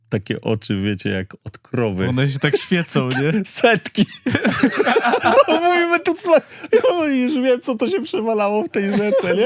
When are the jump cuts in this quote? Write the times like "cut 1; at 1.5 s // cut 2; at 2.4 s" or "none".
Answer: none